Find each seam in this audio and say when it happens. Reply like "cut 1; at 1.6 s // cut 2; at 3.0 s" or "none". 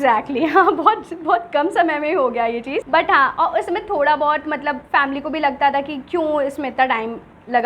none